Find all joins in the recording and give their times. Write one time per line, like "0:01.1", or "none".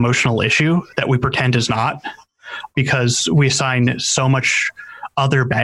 0:02.7